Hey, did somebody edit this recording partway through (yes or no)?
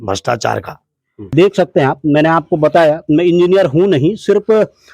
yes